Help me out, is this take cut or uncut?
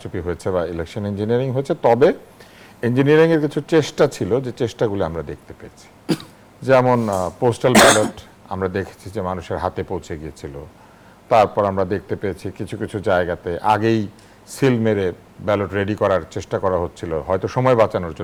uncut